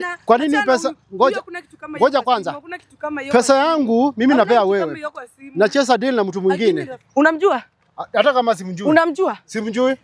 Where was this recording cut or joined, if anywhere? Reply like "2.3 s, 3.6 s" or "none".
7.0 s